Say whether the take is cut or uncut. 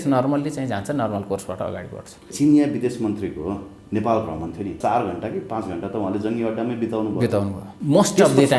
cut